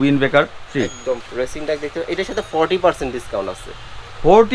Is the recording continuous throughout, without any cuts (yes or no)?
no